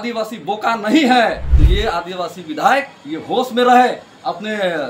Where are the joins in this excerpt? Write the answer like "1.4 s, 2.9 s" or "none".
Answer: 1.5 s

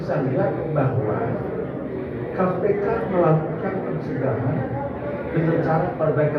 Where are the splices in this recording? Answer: none

